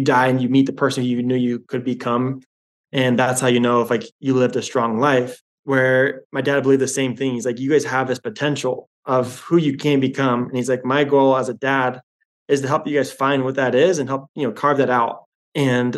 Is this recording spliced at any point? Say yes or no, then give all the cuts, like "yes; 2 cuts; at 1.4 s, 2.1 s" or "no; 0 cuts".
no; 0 cuts